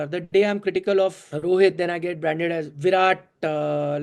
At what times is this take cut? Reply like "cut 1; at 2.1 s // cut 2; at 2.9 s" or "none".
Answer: cut 1; at 1.3 s // cut 2; at 2.7 s